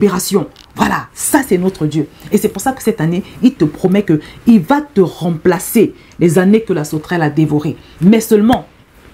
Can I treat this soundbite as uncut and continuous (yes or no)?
yes